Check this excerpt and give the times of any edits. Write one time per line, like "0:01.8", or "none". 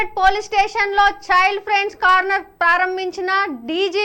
none